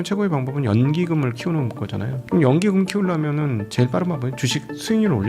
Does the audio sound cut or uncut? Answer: cut